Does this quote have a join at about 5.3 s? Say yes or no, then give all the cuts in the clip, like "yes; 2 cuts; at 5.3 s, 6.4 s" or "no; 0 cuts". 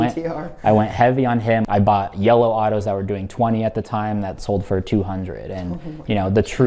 no; 1 cut; at 1.7 s